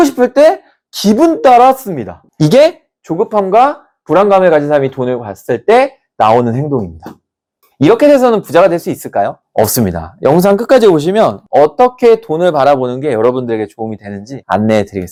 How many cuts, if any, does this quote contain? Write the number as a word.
zero